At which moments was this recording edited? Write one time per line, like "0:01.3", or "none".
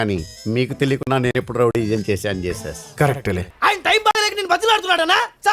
0:03.5